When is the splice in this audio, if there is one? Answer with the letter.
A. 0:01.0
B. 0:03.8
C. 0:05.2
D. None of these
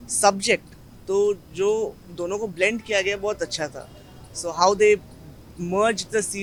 D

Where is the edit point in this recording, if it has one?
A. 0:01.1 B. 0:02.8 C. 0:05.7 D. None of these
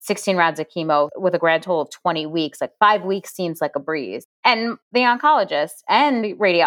D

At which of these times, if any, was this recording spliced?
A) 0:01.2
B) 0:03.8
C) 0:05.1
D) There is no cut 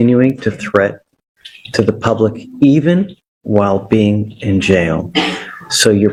D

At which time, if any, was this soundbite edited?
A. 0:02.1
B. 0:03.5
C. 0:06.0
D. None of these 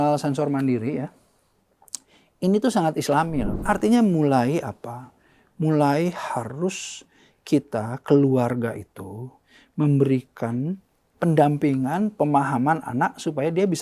B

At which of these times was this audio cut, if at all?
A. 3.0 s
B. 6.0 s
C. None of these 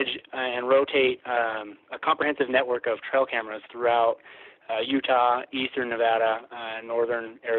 C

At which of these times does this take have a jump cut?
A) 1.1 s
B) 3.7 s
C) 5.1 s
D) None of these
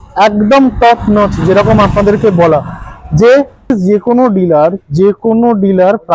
B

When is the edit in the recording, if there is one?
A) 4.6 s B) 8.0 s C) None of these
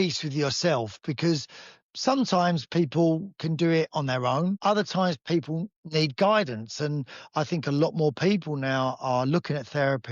A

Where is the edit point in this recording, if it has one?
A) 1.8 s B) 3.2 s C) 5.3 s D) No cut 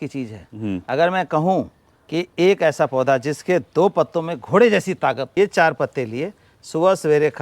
C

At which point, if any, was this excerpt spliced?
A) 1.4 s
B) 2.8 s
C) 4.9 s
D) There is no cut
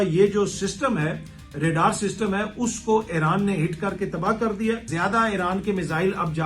C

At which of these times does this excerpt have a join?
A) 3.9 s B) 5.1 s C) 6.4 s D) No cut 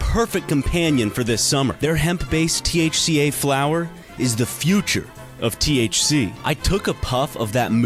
C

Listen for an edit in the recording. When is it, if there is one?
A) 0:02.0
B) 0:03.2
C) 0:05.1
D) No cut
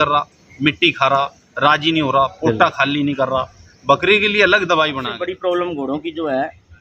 C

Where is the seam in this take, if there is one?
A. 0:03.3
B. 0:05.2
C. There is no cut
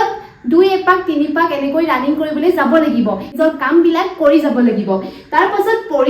A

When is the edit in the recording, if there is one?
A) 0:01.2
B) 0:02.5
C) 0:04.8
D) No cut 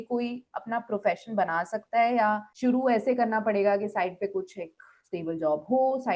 B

